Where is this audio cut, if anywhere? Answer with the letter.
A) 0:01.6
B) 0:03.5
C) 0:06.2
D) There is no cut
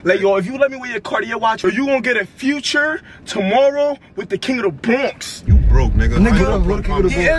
A